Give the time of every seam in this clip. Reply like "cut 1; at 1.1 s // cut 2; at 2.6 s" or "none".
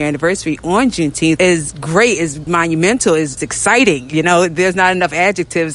cut 1; at 1.4 s // cut 2; at 2.4 s // cut 3; at 3.4 s